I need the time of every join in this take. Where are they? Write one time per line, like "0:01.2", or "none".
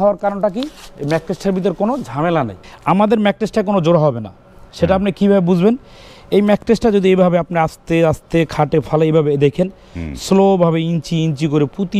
0:02.6